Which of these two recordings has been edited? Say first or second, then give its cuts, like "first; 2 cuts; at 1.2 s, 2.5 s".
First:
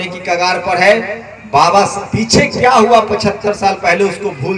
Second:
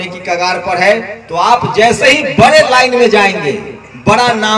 second; 1 cut; at 1.2 s